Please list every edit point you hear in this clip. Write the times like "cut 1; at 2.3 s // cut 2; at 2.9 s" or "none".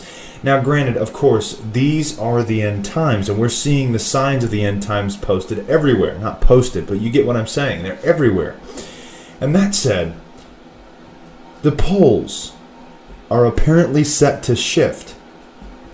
cut 1; at 1.5 s

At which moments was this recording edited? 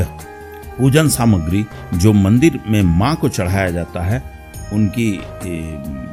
none

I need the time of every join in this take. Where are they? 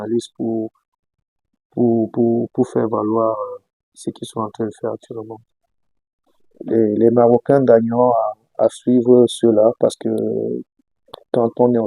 cut 1; at 5.4 s

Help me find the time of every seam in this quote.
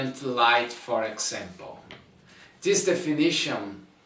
cut 1; at 2.0 s

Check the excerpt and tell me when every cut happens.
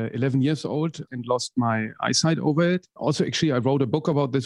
cut 1; at 1.1 s // cut 2; at 2.9 s

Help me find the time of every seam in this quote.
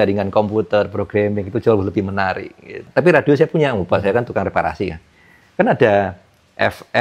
cut 1; at 2.8 s

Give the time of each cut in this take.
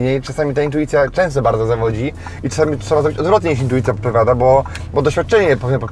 none

